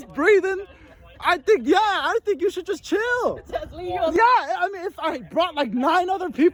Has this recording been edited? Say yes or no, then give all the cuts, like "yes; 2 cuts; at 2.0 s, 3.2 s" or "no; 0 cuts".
no; 0 cuts